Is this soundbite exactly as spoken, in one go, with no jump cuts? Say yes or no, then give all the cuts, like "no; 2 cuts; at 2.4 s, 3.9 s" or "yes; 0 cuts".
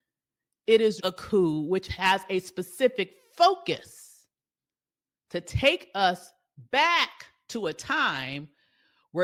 yes; 0 cuts